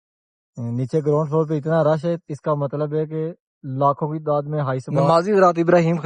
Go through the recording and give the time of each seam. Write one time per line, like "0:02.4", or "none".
0:05.1